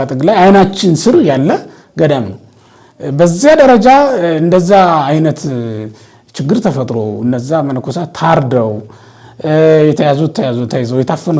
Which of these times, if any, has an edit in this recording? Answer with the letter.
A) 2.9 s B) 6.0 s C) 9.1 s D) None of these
D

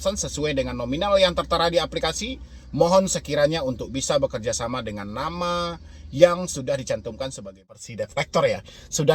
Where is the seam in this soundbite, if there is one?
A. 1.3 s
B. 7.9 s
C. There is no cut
B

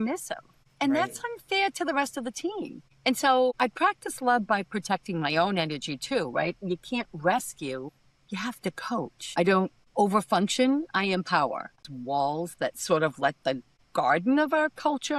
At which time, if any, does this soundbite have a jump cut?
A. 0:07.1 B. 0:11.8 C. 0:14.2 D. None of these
B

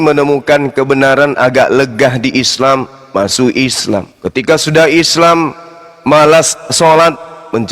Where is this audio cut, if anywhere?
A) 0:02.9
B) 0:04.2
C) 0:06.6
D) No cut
B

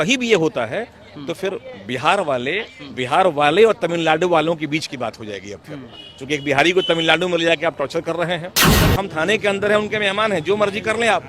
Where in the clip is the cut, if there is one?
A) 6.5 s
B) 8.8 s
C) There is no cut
B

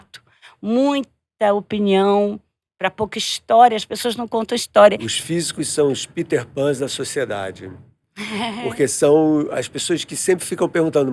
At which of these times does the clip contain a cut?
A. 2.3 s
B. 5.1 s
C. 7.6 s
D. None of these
B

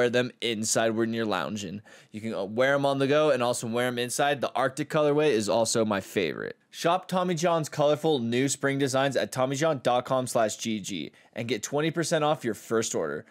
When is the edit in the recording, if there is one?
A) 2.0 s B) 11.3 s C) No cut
C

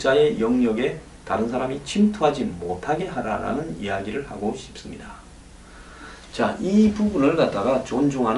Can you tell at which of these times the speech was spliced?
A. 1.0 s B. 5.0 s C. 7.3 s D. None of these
B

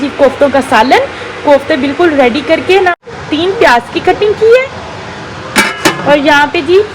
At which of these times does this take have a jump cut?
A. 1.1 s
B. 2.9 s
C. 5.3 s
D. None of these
B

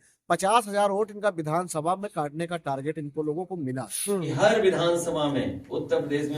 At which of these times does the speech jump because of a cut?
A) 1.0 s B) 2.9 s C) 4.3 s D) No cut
C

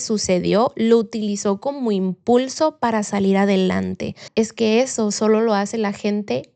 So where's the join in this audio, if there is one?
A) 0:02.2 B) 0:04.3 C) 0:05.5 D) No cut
B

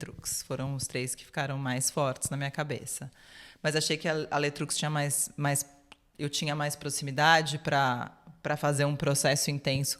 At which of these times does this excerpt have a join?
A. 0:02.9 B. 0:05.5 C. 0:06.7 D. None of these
D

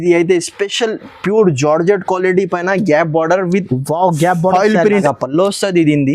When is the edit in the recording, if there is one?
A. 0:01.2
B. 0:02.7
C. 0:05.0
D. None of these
C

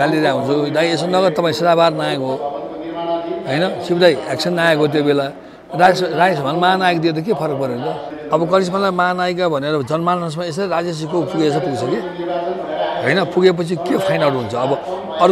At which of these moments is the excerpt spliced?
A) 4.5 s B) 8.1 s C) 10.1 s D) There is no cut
B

